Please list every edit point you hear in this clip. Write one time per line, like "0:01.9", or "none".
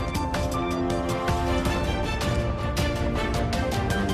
0:02.8